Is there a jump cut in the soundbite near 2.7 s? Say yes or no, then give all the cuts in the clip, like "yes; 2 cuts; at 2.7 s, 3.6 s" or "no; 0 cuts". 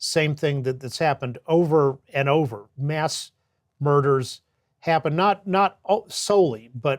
yes; 1 cut; at 2.7 s